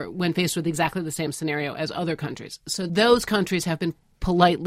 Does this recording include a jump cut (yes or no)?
no